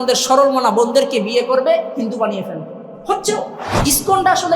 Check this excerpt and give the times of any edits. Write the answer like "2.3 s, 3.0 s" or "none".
3.6 s